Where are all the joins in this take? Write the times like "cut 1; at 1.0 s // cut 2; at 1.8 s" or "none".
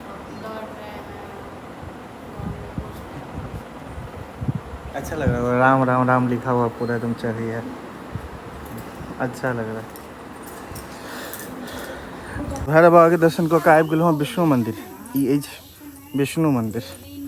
none